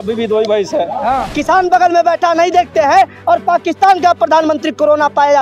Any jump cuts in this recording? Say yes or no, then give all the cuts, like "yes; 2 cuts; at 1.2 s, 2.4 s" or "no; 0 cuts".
yes; 1 cut; at 1.3 s